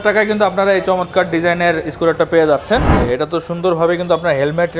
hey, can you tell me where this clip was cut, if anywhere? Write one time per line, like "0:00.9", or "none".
0:02.9